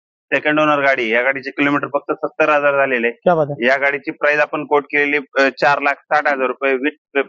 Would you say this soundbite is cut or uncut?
uncut